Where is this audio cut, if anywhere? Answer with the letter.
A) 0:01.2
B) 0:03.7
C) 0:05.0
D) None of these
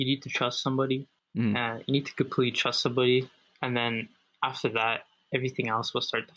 A